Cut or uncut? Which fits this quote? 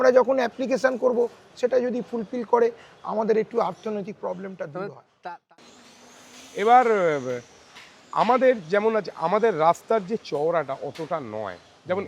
cut